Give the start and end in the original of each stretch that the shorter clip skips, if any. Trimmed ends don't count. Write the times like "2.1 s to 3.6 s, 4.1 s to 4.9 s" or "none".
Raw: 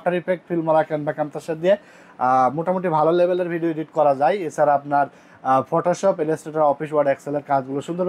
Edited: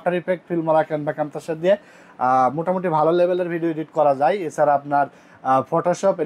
none